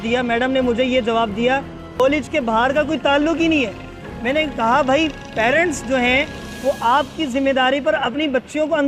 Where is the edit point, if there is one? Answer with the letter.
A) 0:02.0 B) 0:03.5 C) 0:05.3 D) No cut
A